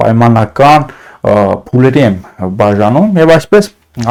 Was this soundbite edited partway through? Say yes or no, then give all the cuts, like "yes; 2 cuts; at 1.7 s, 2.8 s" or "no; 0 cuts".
no; 0 cuts